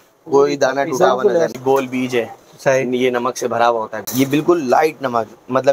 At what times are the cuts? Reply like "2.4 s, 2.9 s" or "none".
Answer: 1.5 s, 4.0 s